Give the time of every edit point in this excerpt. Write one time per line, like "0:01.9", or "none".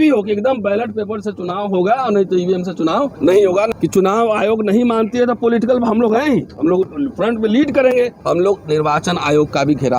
0:03.1
0:03.7
0:08.2

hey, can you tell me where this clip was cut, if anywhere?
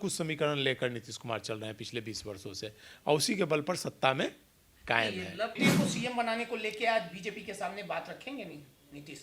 0:05.6

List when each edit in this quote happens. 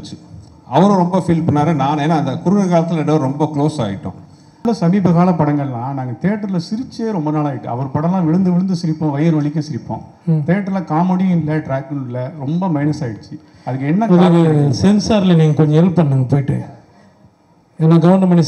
0:04.6

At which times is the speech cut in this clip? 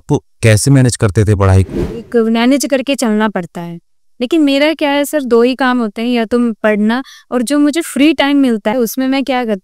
0:01.8
0:08.7

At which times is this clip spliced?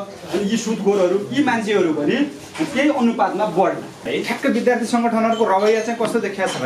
0:04.1

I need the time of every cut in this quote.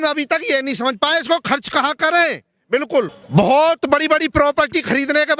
0:03.2

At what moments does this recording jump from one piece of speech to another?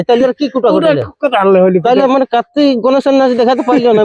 0:02.0

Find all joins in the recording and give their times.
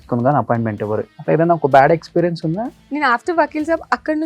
0:01.1
0:02.8

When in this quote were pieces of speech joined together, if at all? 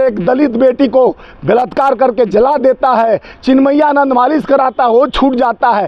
none

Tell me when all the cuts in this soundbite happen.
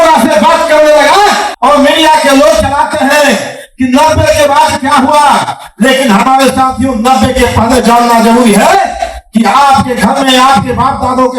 0:01.5

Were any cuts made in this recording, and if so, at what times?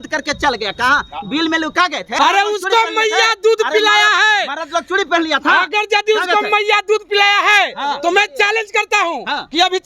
0:02.0

